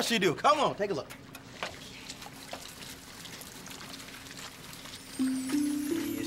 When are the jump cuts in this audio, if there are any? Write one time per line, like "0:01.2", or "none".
0:01.7
0:05.2